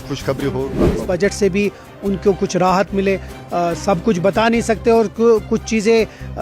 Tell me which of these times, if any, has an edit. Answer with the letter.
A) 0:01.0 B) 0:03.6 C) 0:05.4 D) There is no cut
A